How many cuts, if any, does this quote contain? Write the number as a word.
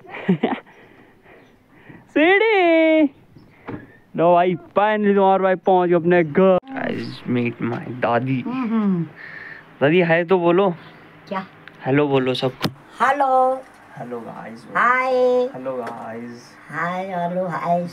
one